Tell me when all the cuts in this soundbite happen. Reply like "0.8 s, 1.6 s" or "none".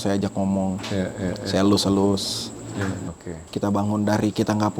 3.0 s